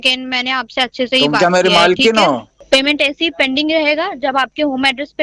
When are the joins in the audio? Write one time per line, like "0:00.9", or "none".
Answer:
0:02.5